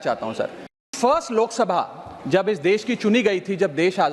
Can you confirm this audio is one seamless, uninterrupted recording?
no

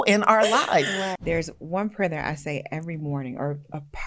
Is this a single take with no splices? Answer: no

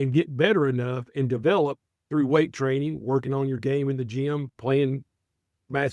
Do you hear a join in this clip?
no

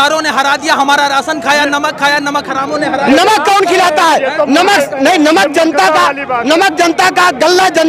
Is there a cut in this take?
no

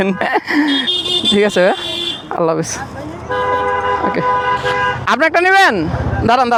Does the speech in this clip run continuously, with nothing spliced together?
yes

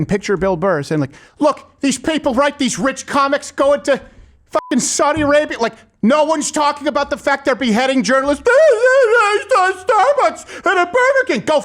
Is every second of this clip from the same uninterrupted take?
yes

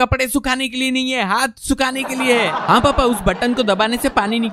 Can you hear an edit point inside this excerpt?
no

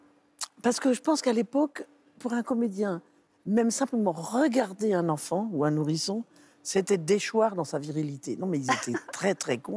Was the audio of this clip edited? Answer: no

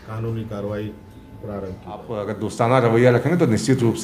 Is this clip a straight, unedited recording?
no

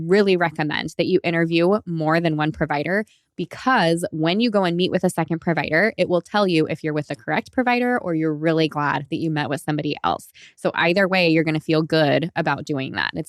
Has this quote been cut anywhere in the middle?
no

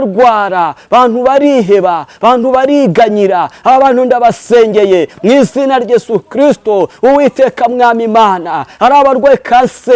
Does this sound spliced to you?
no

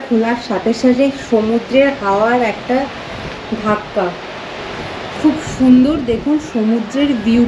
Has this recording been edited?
no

